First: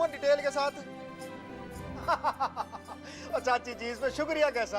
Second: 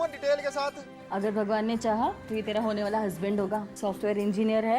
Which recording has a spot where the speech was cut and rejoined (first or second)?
second